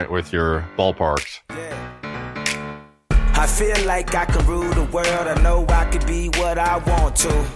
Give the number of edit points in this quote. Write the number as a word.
one